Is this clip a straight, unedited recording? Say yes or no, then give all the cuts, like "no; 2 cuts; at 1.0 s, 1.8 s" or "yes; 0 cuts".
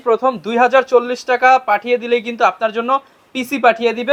yes; 0 cuts